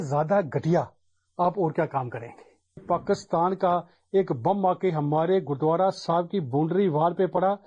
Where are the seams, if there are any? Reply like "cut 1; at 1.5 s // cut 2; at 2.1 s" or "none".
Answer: cut 1; at 2.8 s